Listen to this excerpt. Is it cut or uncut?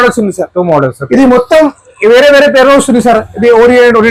uncut